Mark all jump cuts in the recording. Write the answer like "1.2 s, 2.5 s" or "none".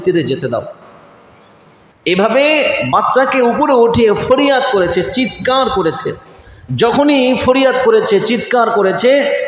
none